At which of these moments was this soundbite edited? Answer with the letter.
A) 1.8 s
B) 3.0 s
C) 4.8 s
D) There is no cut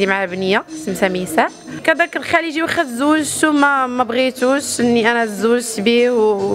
A